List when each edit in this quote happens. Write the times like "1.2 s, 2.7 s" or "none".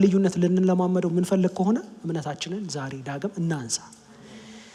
none